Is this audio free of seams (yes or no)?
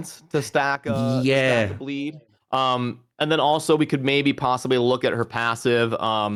yes